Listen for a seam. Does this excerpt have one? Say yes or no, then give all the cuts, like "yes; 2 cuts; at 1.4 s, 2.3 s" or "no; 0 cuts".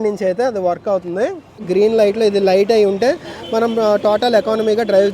yes; 1 cut; at 1.6 s